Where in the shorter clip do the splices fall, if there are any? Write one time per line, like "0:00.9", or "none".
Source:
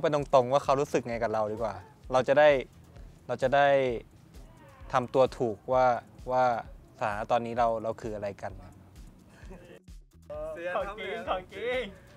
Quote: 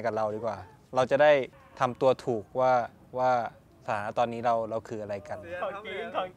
0:01.6
0:05.4